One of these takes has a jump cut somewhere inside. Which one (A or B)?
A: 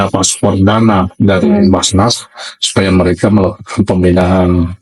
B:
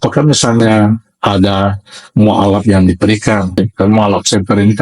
B